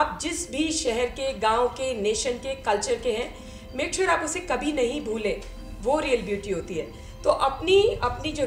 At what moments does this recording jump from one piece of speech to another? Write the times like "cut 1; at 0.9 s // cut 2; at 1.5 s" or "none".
none